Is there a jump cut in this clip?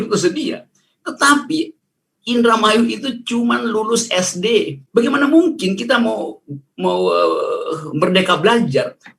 yes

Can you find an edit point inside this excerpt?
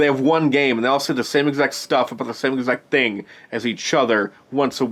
no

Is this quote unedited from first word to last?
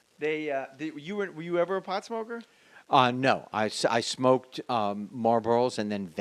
yes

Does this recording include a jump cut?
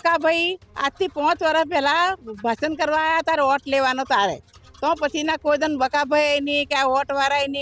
no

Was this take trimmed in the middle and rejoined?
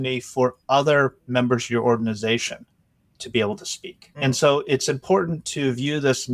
yes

